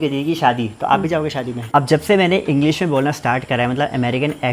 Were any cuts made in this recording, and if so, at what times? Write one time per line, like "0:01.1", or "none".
0:01.6